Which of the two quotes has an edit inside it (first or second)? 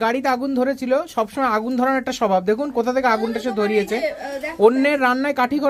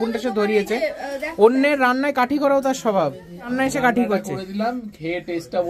second